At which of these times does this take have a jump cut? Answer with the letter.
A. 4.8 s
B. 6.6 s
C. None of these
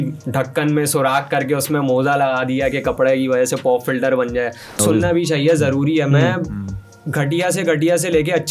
A